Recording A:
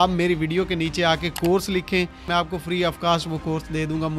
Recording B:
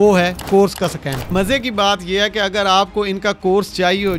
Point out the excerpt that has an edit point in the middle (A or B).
B